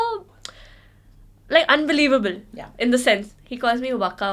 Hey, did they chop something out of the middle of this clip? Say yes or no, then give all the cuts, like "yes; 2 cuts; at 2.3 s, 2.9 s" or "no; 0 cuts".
yes; 1 cut; at 3.3 s